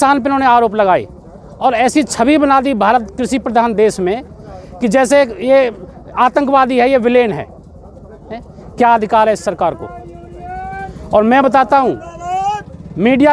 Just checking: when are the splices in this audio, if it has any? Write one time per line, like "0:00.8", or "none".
none